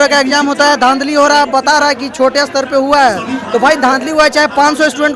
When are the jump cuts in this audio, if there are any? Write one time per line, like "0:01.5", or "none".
none